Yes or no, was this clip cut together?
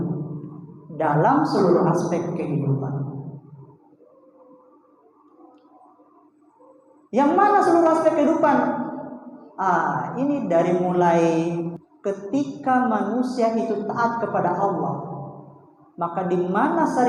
yes